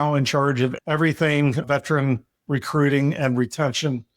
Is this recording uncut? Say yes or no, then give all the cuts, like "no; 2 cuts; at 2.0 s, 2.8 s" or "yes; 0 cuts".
no; 2 cuts; at 0.8 s, 1.6 s